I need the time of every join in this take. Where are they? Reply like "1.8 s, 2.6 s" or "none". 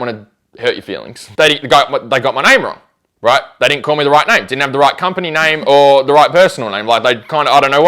1.2 s